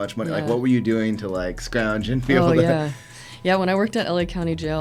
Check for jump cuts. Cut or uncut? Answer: uncut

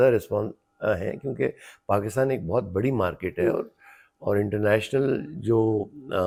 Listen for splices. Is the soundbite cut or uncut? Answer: uncut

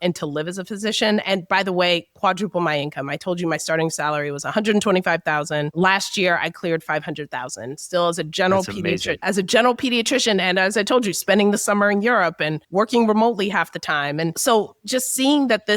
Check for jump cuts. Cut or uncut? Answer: cut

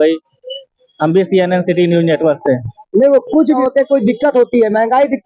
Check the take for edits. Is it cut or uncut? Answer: cut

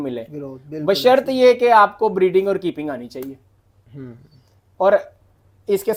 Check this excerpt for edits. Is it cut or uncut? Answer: uncut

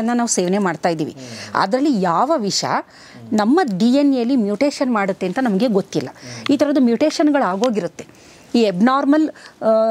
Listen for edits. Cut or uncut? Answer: uncut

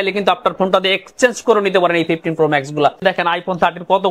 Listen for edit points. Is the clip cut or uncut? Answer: cut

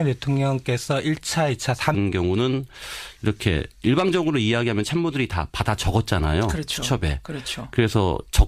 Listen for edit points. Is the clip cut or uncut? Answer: uncut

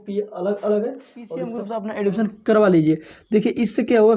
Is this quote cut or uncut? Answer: cut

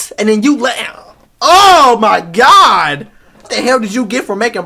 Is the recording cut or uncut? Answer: cut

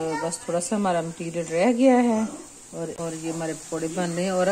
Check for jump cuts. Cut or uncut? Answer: cut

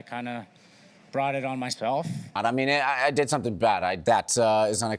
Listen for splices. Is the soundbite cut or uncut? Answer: cut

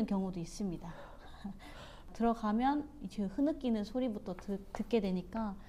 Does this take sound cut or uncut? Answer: cut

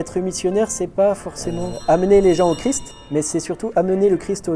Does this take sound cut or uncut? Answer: cut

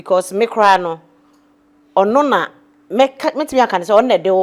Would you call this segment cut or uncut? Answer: uncut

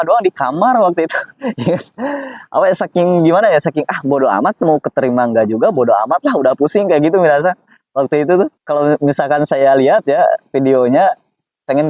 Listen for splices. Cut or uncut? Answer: cut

